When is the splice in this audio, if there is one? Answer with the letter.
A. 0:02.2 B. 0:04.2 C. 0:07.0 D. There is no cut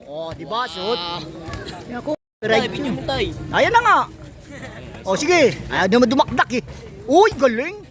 A